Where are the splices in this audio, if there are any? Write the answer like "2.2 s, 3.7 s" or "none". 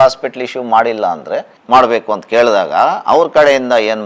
1.6 s